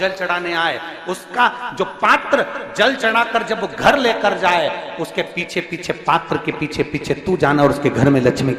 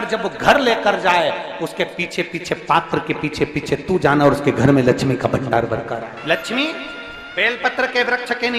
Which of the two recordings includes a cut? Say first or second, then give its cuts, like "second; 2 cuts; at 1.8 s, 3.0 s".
second; 1 cut; at 6.2 s